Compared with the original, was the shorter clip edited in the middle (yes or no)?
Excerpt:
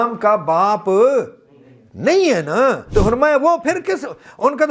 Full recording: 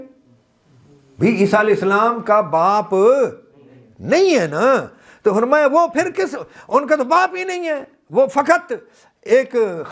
yes